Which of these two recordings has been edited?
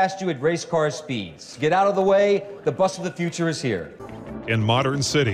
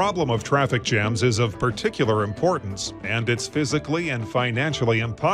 first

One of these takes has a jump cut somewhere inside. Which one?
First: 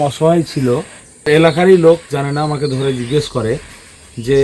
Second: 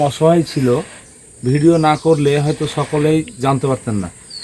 first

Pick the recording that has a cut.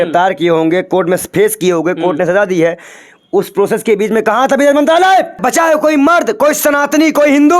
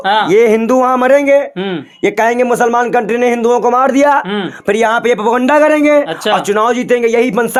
first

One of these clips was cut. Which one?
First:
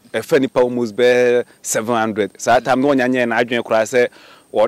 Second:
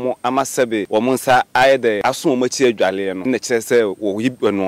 second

